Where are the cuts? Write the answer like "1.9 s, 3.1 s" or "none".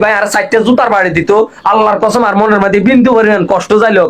none